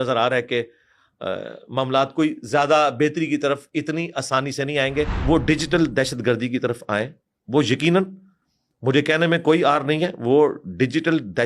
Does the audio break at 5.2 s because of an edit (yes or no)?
yes